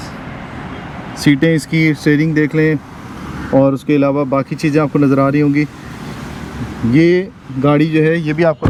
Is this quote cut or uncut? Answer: uncut